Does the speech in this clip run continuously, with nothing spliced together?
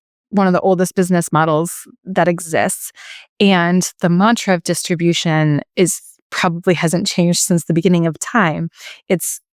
no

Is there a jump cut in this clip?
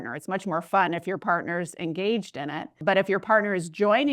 yes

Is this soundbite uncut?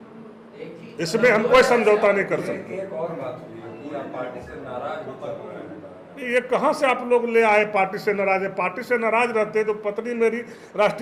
yes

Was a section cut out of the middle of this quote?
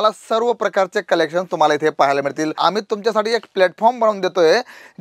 yes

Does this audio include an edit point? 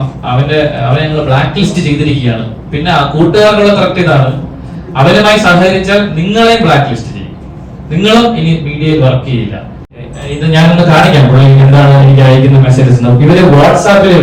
yes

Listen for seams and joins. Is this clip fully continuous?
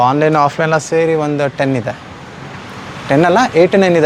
yes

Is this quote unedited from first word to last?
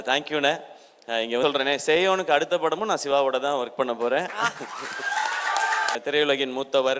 no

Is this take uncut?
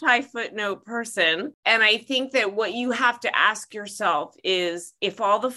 no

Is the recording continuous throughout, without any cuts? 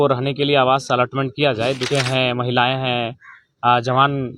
no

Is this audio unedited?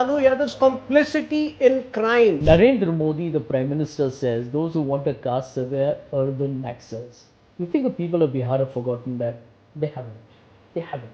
no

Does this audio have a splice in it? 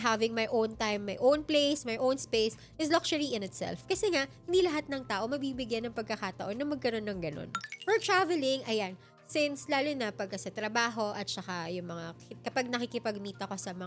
no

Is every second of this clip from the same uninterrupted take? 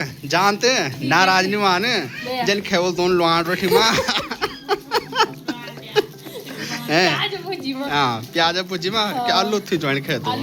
yes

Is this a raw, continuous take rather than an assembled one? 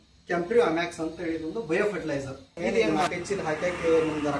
no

